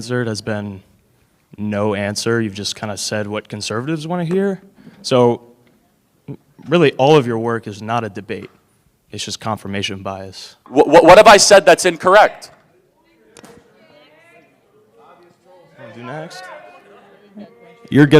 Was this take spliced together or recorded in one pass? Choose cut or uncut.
cut